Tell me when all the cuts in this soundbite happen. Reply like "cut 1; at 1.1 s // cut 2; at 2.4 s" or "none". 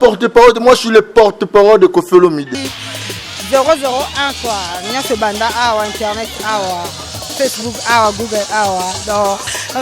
cut 1; at 2.8 s